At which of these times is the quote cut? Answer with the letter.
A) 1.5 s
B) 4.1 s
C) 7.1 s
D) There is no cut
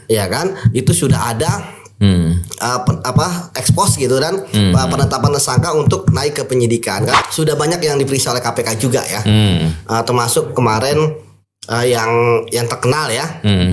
C